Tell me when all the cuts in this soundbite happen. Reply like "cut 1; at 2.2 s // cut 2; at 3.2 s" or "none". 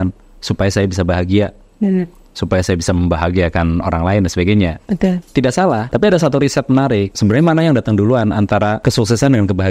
cut 1; at 5.8 s // cut 2; at 7.1 s // cut 3; at 8.8 s

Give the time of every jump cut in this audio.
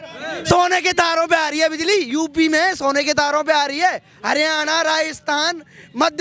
none

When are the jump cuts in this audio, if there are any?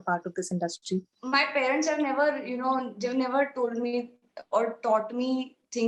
none

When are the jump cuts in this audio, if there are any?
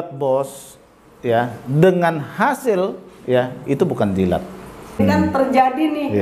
cut 1; at 5.0 s

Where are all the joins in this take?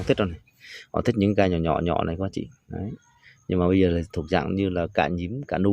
none

